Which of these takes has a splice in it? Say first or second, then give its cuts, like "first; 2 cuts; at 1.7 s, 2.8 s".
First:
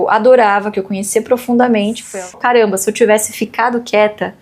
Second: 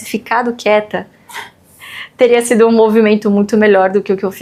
first; 1 cut; at 2.3 s